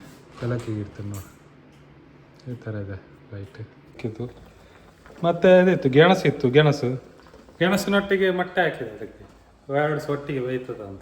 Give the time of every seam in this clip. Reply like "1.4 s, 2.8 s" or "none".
4.0 s